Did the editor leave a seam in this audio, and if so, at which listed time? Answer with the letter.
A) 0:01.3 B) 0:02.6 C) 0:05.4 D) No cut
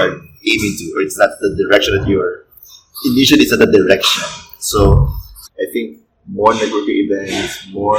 C